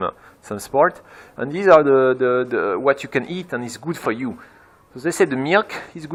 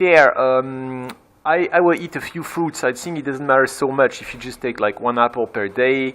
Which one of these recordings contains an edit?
second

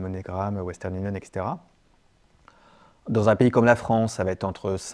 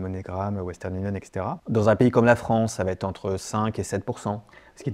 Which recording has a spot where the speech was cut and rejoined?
second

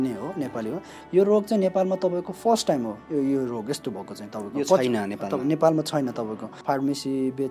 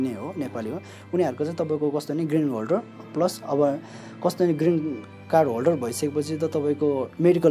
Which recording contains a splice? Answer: first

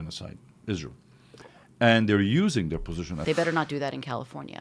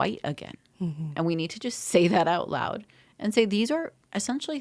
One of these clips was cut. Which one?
first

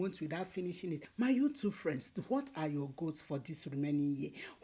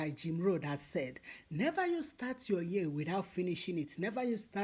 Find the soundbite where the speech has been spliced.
first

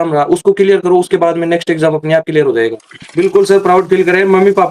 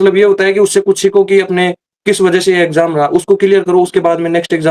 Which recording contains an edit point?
first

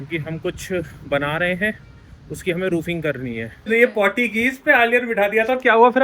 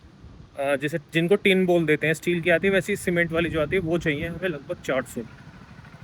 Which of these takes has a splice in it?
first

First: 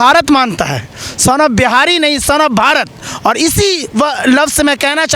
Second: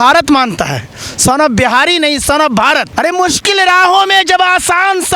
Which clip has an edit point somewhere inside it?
second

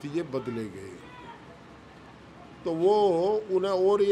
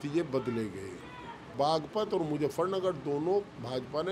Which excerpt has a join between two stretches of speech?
second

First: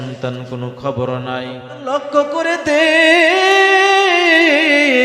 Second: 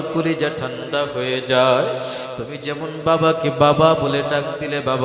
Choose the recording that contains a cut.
first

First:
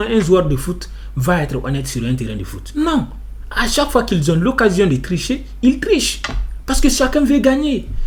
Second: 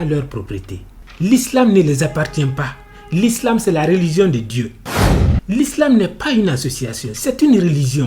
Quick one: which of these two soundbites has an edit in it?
second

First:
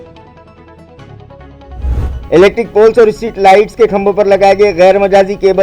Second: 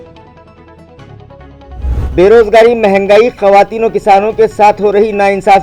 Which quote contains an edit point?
second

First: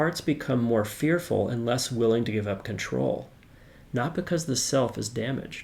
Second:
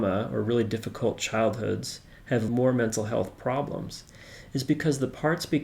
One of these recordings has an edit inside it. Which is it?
second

